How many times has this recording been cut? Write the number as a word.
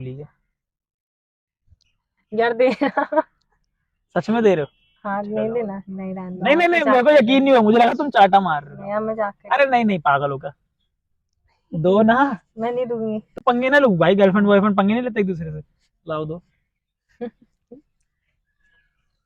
zero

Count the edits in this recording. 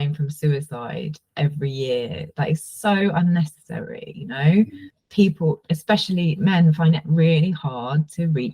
one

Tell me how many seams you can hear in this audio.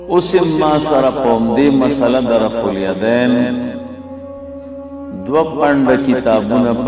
two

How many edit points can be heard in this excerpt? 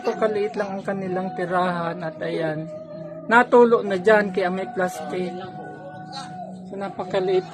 zero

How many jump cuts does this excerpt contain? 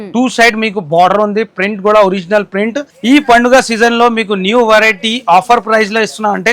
one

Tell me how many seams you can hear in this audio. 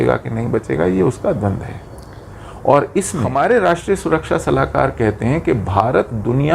one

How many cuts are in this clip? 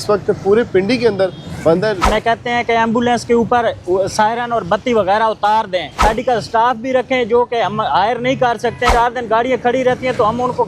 three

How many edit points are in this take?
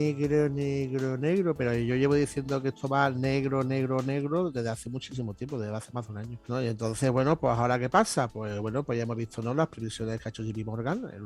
zero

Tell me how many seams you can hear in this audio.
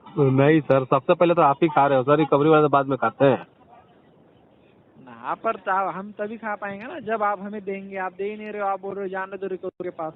zero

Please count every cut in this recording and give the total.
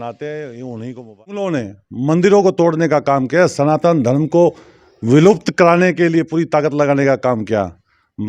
one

